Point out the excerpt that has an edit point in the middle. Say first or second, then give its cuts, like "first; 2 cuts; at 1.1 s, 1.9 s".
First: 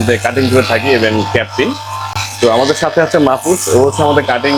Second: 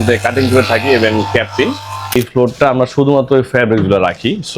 second; 1 cut; at 2.1 s